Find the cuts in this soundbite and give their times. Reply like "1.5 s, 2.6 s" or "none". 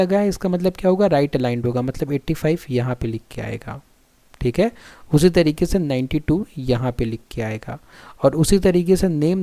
none